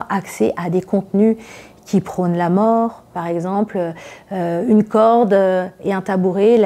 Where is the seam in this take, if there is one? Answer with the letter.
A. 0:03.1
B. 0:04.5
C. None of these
A